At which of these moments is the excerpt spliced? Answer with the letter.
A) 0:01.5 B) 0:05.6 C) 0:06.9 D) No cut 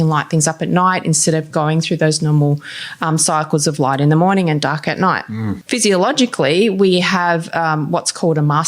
B